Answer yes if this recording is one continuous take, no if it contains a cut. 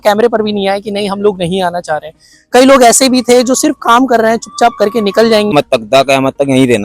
no